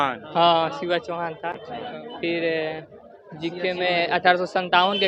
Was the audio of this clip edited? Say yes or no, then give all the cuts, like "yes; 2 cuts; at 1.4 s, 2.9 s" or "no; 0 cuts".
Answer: no; 0 cuts